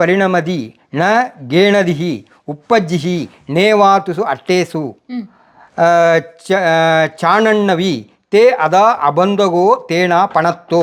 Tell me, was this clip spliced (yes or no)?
no